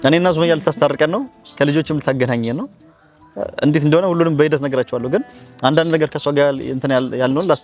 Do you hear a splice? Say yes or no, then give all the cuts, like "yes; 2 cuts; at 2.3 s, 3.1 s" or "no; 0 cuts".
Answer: no; 0 cuts